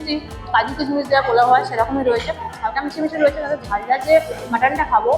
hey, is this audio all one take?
yes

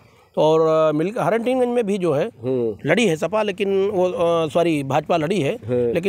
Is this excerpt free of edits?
yes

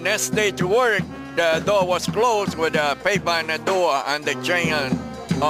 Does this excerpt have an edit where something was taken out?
no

